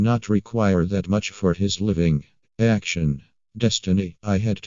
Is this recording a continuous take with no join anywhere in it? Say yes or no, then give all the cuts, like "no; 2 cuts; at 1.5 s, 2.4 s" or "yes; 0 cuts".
no; 1 cut; at 2.4 s